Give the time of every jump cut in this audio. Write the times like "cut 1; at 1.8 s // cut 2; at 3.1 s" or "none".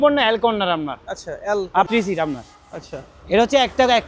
cut 1; at 1.9 s